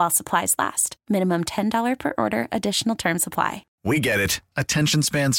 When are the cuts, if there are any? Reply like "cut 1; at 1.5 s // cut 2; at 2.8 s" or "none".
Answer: cut 1; at 3.7 s